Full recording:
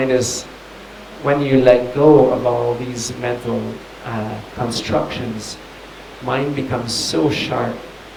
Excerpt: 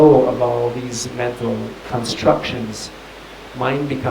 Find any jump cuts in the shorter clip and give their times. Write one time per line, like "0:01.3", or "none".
0:01.8